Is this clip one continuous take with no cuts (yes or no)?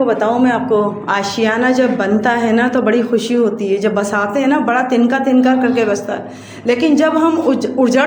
yes